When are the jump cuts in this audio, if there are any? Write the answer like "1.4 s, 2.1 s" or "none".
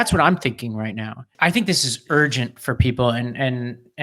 1.3 s

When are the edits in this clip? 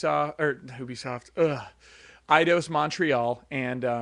2.1 s

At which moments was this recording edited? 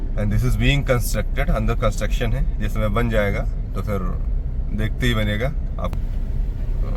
5.9 s

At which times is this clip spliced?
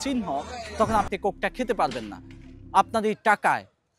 2.5 s

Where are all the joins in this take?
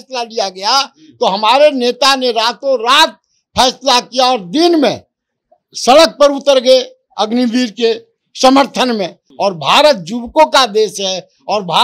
9.2 s

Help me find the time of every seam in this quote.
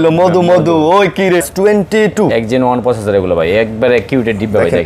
1.4 s

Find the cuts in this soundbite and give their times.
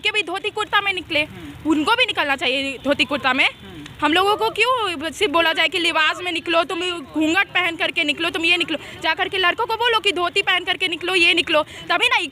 none

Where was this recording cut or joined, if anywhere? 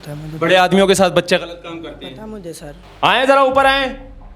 2.8 s

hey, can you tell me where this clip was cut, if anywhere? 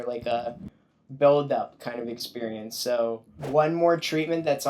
3.3 s

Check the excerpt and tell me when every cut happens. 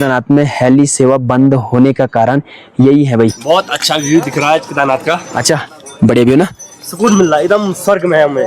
3.4 s

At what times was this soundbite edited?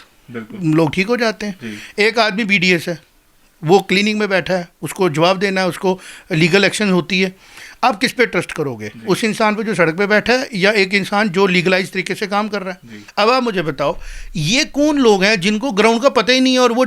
13.0 s

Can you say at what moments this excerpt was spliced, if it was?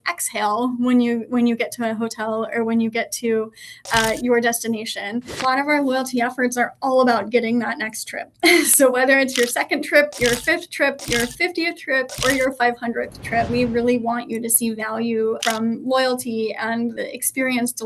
5.4 s, 13.5 s, 15.4 s, 17.0 s

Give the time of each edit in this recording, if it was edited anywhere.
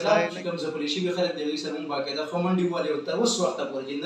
none

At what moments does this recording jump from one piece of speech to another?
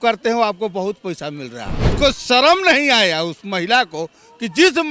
1.9 s

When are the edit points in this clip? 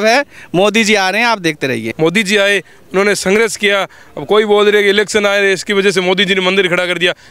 1.9 s

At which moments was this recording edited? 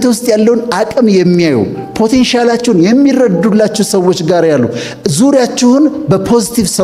none

